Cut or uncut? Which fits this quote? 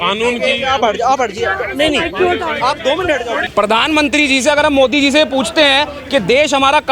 cut